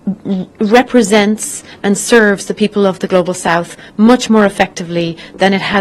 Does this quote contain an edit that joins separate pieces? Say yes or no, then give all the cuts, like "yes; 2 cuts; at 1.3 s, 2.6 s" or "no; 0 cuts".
no; 0 cuts